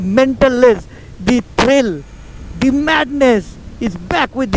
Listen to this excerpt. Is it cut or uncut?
uncut